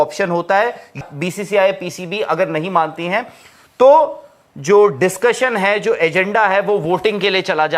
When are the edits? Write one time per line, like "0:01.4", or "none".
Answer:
0:01.0